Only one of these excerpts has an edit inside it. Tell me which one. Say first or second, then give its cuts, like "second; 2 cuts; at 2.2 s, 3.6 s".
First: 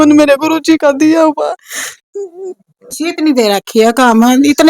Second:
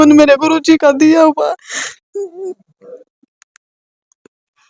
first; 1 cut; at 3.2 s